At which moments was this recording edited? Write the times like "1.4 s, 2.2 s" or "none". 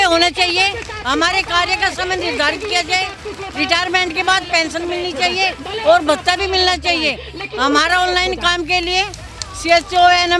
none